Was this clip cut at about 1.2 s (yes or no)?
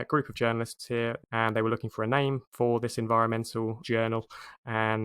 yes